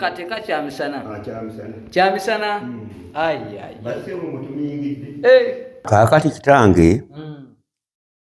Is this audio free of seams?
no; 1 cut; at 5.9 s

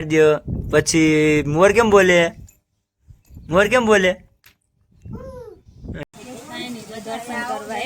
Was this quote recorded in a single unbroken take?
no; 1 cut; at 6.0 s

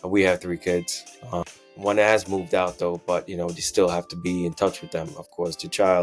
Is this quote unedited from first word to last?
no; 1 cut; at 1.5 s

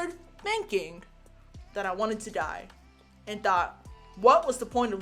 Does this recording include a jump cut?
no; 0 cuts

